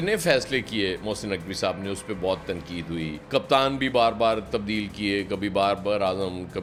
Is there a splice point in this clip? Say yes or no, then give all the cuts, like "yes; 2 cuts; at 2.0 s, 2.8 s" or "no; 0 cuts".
no; 0 cuts